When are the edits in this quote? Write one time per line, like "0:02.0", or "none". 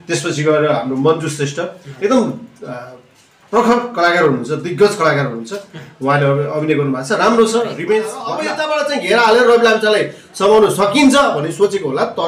0:08.5